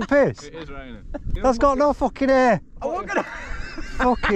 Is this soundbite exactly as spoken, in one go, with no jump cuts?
no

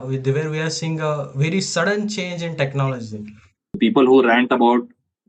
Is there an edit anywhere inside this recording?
yes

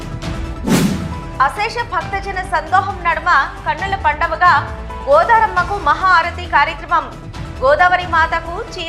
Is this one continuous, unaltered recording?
no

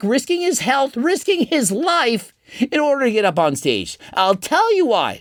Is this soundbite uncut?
yes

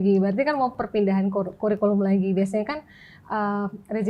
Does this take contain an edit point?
no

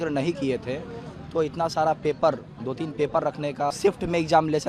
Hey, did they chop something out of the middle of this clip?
yes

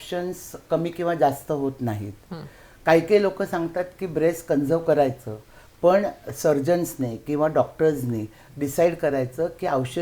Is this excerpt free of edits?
yes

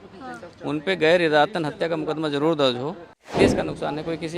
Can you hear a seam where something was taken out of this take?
yes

